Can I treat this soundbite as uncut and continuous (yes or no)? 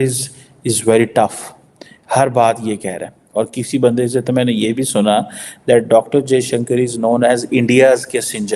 yes